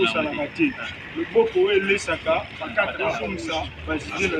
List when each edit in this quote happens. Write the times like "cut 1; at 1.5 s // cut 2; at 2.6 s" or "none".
cut 1; at 3.3 s